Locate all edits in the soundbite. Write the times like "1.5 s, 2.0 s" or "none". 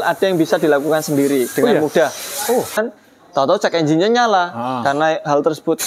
2.8 s